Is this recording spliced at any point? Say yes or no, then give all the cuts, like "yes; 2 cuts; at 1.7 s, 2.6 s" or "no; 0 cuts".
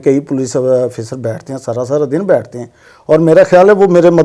no; 0 cuts